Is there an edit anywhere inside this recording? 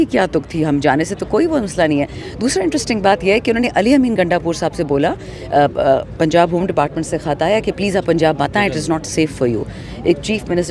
no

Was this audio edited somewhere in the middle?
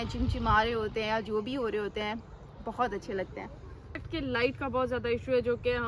yes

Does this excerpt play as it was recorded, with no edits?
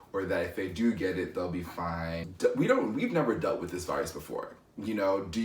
no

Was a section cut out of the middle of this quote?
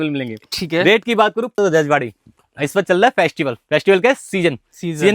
yes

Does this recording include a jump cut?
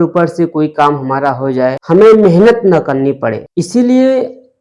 yes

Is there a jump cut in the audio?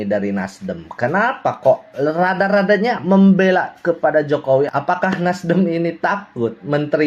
no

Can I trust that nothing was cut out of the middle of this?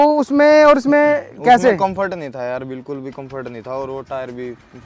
yes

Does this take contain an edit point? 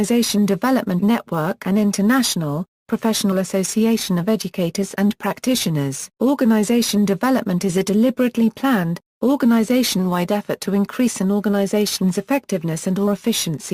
no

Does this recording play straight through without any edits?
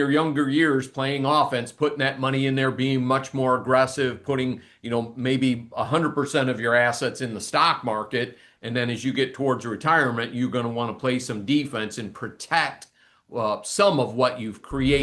yes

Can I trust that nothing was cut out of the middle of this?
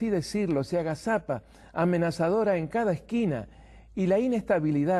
yes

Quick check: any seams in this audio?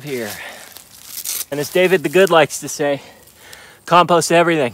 yes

